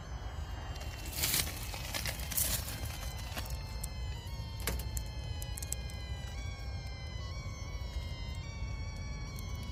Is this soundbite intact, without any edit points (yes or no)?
yes